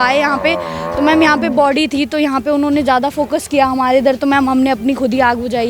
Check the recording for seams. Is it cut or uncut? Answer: uncut